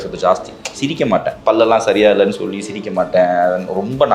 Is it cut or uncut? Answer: cut